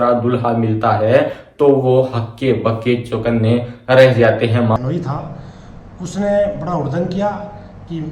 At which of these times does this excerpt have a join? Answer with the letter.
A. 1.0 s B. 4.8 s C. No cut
B